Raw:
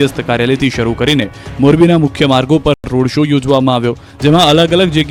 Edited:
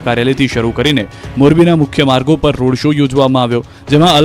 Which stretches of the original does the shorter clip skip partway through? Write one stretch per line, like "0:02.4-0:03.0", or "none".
0:02.8-0:02.9